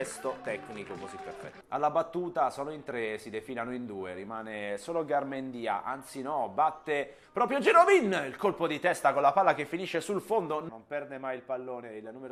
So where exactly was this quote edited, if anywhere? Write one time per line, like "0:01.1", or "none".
none